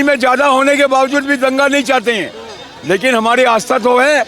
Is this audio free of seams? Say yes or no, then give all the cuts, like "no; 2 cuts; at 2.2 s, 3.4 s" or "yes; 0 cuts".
yes; 0 cuts